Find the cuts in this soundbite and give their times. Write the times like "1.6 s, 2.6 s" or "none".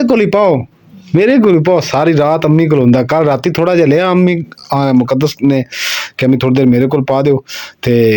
none